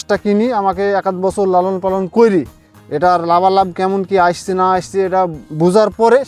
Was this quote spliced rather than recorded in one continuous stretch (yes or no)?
no